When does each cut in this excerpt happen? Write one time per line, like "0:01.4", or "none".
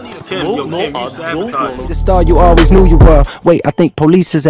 0:01.9